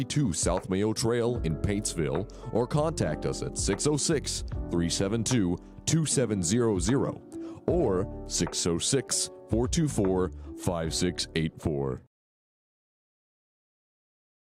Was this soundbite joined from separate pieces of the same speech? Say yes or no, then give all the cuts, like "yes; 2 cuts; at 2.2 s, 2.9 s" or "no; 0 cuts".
no; 0 cuts